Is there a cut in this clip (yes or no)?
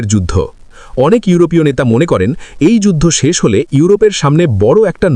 no